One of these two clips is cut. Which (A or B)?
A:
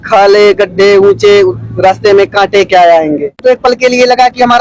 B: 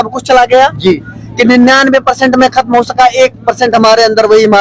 A